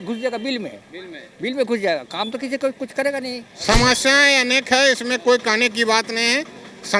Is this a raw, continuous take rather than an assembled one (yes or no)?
no